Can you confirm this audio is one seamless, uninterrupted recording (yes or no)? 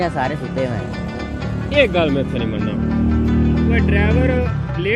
yes